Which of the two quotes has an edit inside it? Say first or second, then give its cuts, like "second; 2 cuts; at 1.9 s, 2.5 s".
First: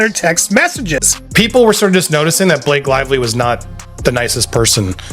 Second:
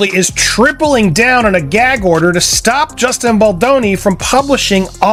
first; 1 cut; at 1.2 s